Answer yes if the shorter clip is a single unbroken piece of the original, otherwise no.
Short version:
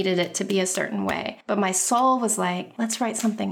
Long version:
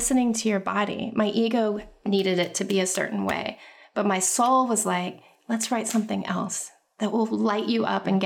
no